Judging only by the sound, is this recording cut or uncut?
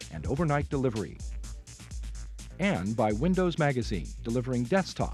uncut